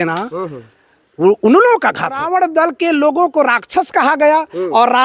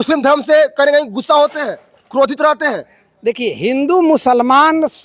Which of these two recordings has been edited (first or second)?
first